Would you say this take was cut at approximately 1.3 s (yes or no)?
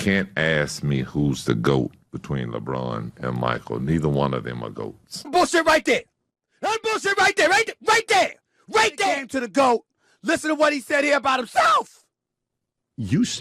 no